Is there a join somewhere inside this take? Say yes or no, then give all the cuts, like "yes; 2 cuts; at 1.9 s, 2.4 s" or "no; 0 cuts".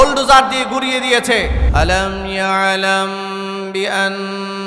yes; 1 cut; at 1.6 s